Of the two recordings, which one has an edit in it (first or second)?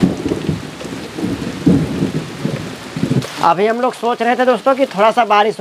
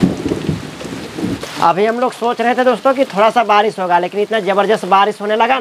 second